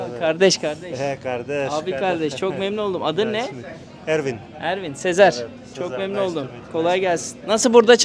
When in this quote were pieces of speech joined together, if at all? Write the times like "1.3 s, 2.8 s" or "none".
none